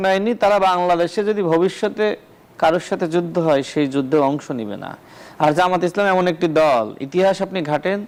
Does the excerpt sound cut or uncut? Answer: uncut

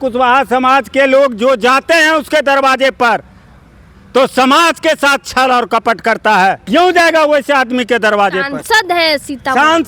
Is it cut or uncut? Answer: cut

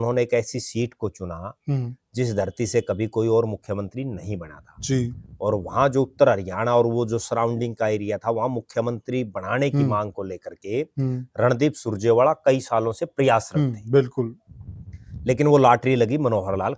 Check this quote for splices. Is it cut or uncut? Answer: uncut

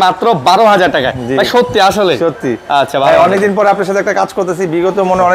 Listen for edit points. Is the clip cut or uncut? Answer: uncut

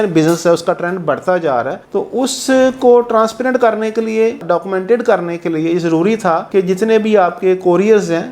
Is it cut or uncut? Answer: uncut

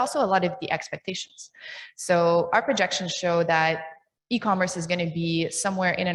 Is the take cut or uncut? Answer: uncut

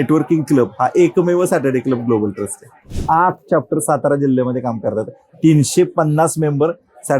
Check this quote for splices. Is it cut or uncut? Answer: cut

